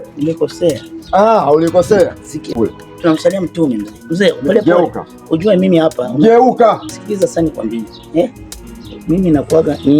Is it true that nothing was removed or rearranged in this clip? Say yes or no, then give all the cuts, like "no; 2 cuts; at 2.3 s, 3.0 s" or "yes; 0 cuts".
no; 1 cut; at 2.5 s